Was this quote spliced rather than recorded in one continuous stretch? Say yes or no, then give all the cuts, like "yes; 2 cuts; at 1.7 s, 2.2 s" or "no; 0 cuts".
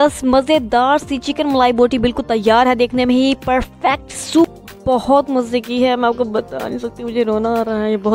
yes; 1 cut; at 4.5 s